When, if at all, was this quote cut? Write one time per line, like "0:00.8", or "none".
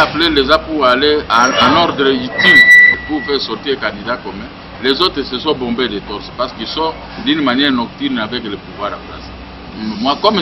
0:01.3
0:03.0